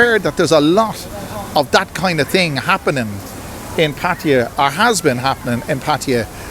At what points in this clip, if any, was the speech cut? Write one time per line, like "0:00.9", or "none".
none